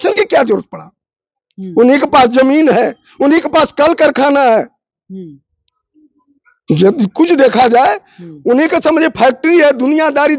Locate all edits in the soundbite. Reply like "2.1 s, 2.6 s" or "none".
none